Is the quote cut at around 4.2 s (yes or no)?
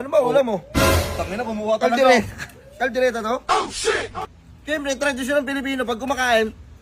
yes